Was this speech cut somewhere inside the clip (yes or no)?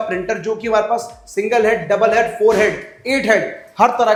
no